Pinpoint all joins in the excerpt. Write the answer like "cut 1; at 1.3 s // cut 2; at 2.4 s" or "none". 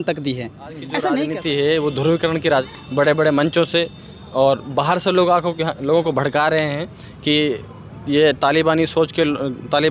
cut 1; at 1.2 s // cut 2; at 2.7 s